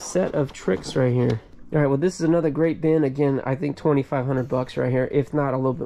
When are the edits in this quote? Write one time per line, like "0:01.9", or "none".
0:01.5